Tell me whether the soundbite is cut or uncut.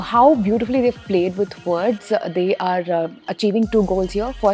cut